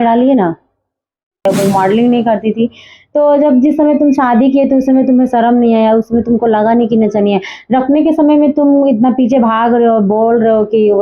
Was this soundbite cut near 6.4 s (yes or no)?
no